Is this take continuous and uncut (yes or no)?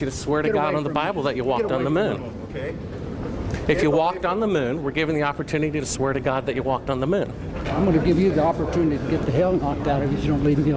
yes